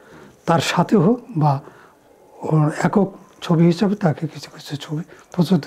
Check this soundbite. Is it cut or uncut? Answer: uncut